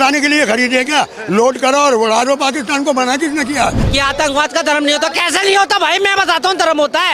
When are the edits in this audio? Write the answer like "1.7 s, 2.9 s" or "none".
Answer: 3.8 s